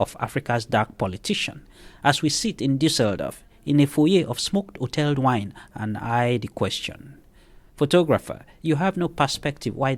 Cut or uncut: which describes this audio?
uncut